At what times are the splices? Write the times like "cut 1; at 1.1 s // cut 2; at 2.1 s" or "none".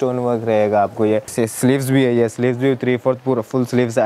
cut 1; at 1.3 s